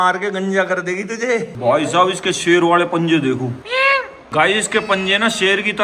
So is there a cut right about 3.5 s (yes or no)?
no